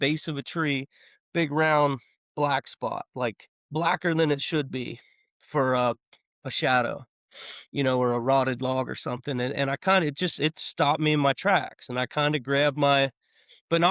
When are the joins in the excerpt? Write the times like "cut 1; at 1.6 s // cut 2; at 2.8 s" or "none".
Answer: cut 1; at 3.5 s